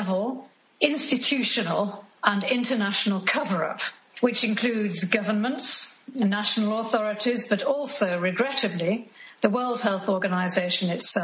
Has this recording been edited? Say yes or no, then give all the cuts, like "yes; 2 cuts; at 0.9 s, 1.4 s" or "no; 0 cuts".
no; 0 cuts